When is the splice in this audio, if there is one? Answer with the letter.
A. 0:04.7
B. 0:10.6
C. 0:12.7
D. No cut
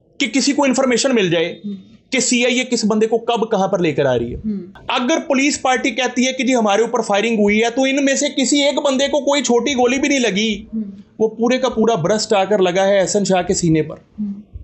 A